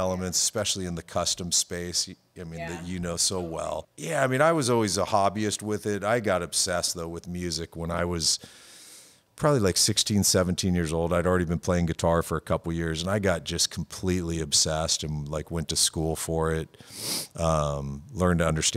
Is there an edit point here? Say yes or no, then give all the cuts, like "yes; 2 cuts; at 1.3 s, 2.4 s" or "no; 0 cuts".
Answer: yes; 1 cut; at 3.9 s